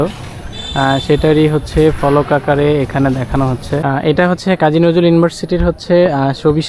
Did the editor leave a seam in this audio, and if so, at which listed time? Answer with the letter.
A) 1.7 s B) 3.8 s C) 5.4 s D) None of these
B